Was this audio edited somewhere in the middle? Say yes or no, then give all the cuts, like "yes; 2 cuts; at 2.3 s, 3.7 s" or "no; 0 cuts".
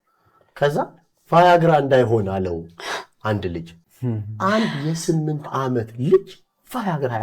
yes; 1 cut; at 3.8 s